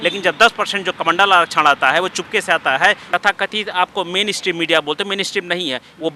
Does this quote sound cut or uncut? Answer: cut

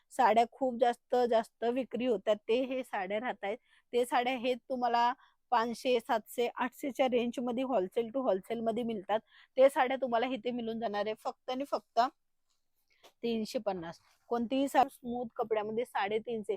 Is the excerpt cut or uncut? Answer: cut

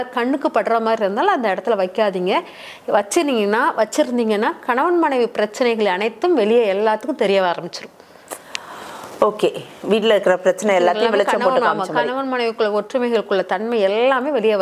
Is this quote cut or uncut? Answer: uncut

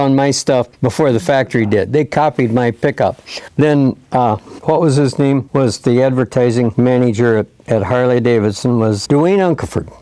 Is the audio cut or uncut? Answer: cut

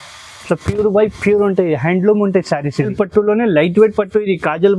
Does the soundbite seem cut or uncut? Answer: cut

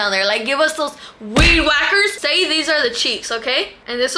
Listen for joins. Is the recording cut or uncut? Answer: cut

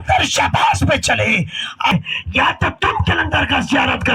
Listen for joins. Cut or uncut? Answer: cut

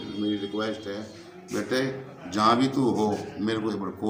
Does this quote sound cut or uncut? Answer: uncut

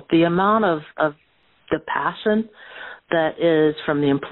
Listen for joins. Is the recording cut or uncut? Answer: cut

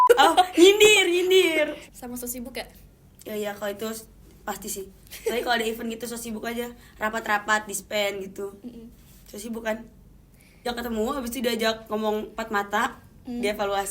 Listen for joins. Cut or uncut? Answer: cut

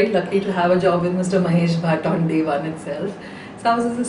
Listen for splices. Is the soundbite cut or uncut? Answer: cut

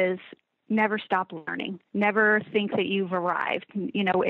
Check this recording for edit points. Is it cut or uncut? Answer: uncut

